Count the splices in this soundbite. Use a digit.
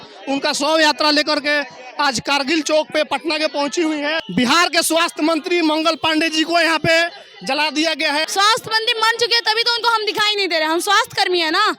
2